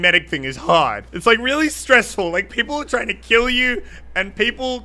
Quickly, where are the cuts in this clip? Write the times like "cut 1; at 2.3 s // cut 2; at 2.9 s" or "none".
cut 1; at 1.1 s